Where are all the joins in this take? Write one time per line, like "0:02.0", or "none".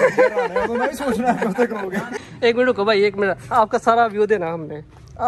0:02.1